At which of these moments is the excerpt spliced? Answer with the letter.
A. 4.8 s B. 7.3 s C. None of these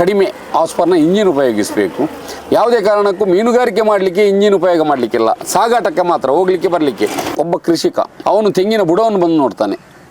B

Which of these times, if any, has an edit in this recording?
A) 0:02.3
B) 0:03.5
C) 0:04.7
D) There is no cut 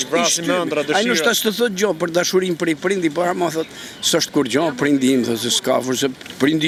D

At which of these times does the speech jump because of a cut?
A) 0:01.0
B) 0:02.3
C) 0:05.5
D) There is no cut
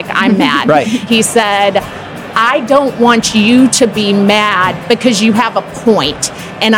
A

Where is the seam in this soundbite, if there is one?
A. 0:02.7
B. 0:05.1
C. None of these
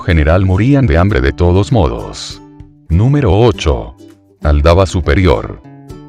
C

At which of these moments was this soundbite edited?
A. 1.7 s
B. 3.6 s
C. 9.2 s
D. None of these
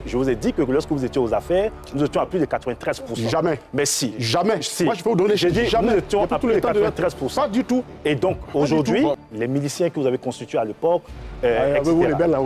C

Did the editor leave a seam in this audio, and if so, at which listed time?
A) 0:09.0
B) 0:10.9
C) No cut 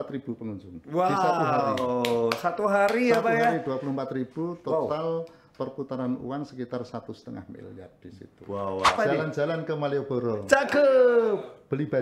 A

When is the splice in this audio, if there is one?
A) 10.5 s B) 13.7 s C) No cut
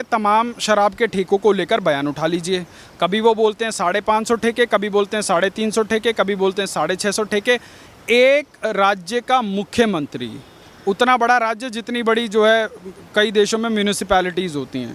C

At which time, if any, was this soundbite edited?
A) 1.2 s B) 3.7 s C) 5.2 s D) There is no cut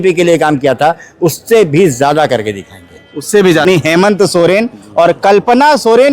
B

